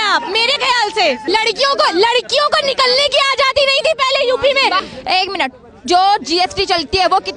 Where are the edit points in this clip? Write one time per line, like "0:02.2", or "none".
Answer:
0:01.2
0:04.8